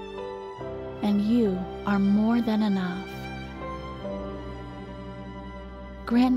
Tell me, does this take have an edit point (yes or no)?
no